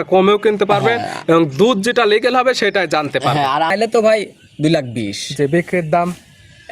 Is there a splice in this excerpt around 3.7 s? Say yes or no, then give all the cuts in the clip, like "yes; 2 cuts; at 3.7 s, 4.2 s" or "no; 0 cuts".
yes; 1 cut; at 3.7 s